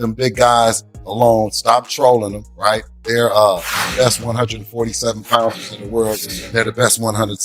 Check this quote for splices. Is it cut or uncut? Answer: uncut